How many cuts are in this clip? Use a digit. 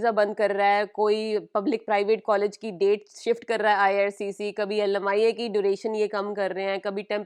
0